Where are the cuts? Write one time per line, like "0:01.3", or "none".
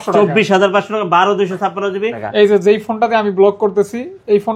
0:02.2